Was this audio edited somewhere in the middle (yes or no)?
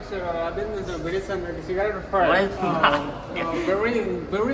yes